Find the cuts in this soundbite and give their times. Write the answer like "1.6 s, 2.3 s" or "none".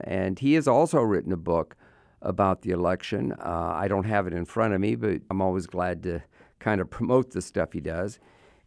5.3 s